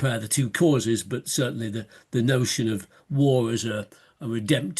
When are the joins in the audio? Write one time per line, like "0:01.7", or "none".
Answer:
none